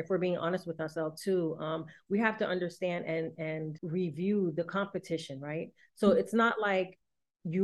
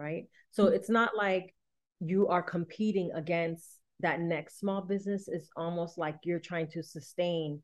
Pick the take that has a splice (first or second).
first